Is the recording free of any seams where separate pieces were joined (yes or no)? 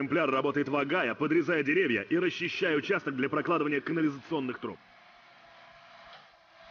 no